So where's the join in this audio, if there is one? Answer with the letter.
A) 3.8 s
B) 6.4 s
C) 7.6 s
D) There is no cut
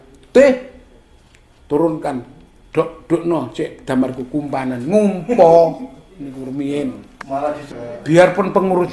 C